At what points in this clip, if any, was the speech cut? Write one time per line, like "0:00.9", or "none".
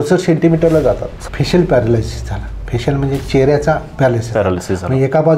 0:01.1